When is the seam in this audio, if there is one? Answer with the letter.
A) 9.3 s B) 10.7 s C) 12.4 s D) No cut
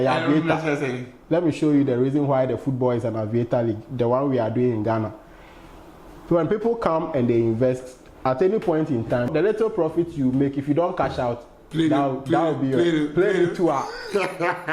A